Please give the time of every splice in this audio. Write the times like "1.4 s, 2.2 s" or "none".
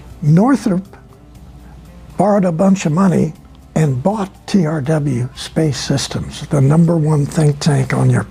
none